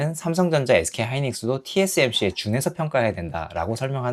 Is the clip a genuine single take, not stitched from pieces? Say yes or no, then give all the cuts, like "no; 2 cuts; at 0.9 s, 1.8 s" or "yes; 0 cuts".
yes; 0 cuts